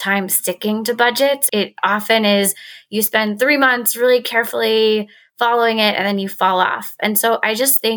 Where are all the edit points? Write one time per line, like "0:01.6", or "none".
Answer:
0:01.4